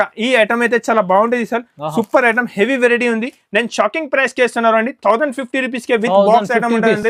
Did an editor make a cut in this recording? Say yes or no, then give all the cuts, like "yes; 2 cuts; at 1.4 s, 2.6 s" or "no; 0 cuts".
no; 0 cuts